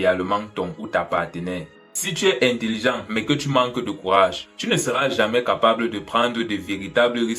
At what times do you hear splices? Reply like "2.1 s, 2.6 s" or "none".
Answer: 1.9 s